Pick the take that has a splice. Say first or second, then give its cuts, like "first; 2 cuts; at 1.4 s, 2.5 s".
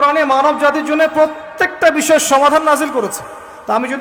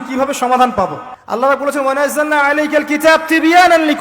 second; 1 cut; at 1.1 s